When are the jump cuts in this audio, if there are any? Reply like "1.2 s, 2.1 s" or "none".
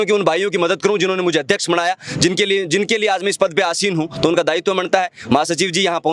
none